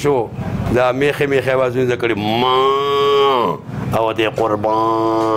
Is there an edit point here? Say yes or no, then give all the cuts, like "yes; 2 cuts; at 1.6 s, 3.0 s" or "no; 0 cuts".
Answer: no; 0 cuts